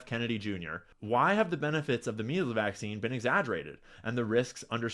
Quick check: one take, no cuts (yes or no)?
no